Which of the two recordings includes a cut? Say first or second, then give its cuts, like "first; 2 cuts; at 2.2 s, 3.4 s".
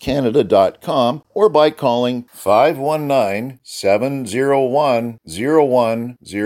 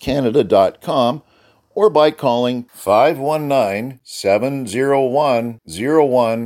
first; 1 cut; at 1.2 s